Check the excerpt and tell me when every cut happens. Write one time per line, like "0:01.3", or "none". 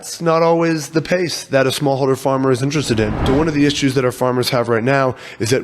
0:03.2